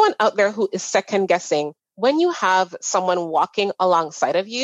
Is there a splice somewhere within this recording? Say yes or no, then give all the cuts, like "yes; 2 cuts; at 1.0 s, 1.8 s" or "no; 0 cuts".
yes; 1 cut; at 1.8 s